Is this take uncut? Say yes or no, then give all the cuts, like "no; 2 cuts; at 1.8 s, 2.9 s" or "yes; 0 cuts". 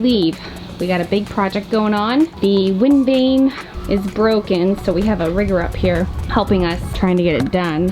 no; 2 cuts; at 2.3 s, 3.7 s